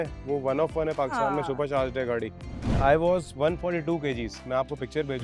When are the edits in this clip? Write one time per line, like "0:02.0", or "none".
0:02.8